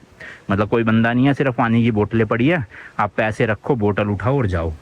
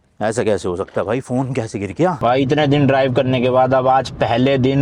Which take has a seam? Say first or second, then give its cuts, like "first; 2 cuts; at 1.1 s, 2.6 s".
second; 1 cut; at 2.2 s